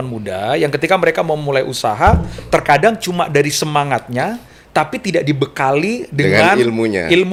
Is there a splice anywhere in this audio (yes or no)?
no